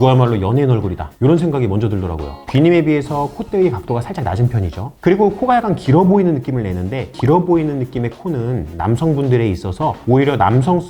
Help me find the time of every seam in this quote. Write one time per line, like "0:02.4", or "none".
0:02.4

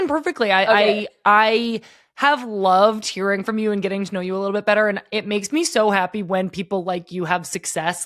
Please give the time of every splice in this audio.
none

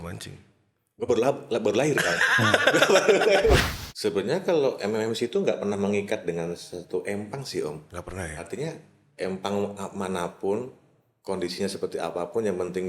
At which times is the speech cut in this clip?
0:03.6

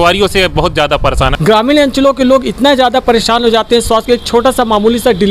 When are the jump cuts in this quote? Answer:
0:01.3

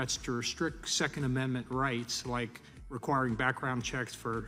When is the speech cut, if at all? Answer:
none

